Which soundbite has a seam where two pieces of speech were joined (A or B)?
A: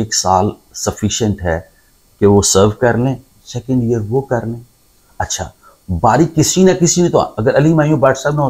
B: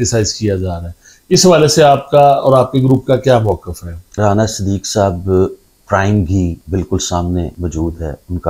B